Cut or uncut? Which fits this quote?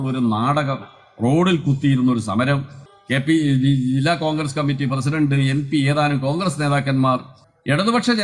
uncut